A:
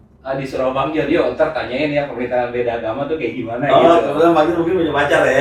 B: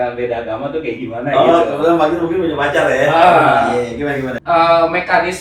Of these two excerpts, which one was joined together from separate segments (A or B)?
B